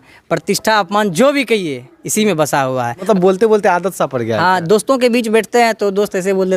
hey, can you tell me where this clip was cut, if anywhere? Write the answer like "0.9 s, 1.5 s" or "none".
3.0 s